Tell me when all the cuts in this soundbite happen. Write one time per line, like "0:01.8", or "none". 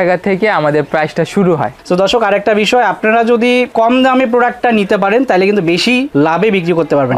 none